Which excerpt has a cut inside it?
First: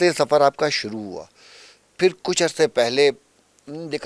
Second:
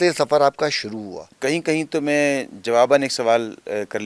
second; 1 cut; at 1.2 s

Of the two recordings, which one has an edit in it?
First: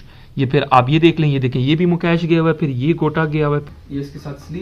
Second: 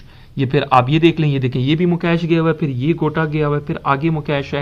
first; 1 cut; at 3.6 s

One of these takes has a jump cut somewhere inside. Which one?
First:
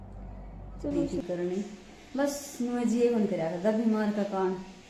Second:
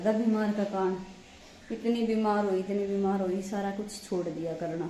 first; 1 cut; at 1.0 s

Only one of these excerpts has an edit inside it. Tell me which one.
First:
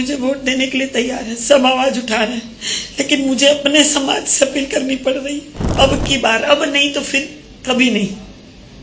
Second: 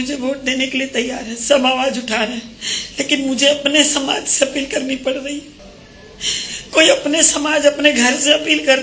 first; 1 cut; at 5.6 s

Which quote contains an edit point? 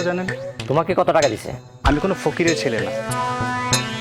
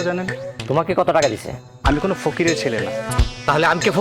second; 1 cut; at 3.1 s

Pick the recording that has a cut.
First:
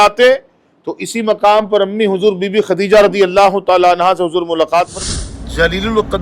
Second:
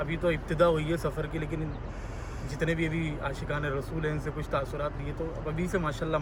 first; 1 cut; at 5.1 s

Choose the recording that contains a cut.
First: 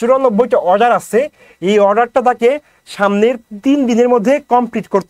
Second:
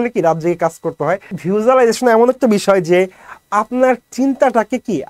second; 1 cut; at 1.3 s

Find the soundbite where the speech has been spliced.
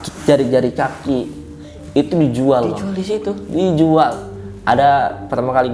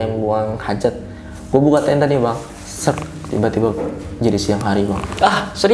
first; 1 cut; at 4.5 s

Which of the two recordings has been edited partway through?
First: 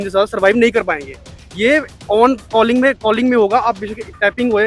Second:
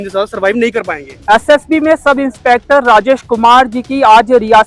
second; 1 cut; at 1.1 s

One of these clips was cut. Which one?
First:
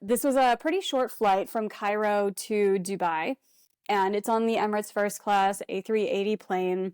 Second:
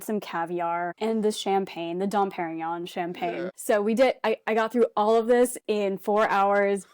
second; 2 cuts; at 0.9 s, 3.5 s

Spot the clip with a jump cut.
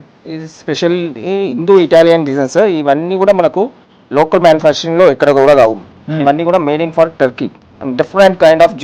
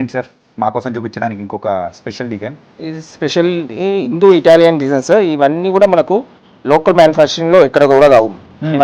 first; 1 cut; at 7.7 s

